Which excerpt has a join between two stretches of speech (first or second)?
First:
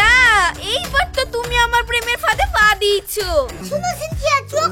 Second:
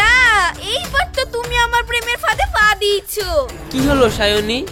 first